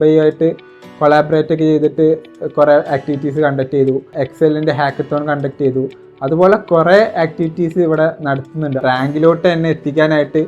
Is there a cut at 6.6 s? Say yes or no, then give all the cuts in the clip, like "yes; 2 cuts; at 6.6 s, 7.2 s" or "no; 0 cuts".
no; 2 cuts; at 4.1 s, 8.8 s